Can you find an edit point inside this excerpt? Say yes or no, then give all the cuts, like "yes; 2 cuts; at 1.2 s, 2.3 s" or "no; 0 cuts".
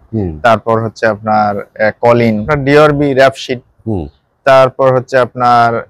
yes; 1 cut; at 2.5 s